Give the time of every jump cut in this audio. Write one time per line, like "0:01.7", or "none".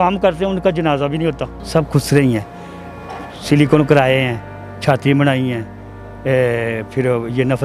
0:01.5